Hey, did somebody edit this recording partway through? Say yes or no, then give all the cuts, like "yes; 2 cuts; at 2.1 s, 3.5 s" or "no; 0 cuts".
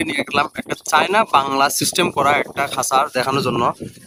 no; 0 cuts